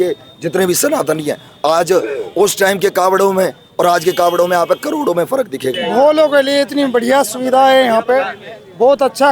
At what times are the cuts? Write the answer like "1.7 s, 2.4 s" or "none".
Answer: 5.7 s